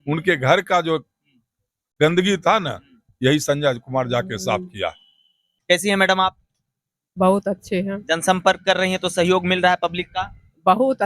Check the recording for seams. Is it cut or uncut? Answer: cut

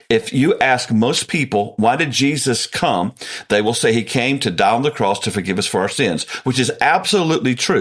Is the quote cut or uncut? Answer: uncut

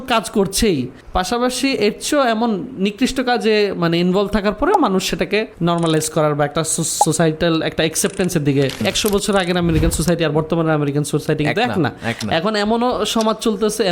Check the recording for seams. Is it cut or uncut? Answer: cut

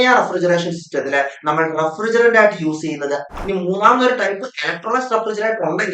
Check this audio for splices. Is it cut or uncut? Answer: cut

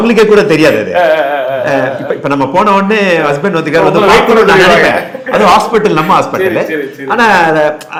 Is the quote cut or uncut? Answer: uncut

